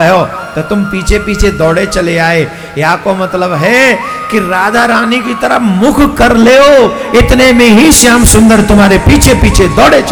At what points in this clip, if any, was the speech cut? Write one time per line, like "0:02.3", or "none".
none